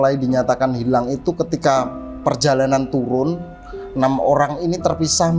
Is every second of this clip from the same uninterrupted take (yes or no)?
yes